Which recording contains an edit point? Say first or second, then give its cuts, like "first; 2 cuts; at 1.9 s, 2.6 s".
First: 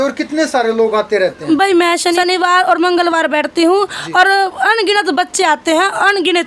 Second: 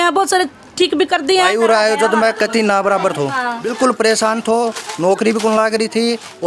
second; 2 cuts; at 1.5 s, 3.6 s